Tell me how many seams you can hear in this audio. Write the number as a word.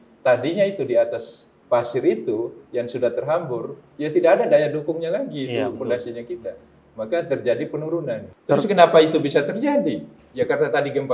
one